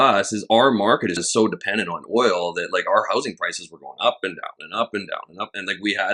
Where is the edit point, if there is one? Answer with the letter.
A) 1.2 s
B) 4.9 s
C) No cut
A